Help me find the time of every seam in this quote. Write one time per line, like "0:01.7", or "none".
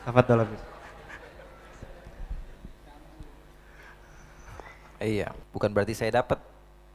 0:05.4